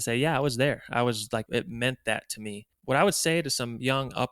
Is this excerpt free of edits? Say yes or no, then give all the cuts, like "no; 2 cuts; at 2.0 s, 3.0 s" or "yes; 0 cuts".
no; 2 cuts; at 1.5 s, 2.7 s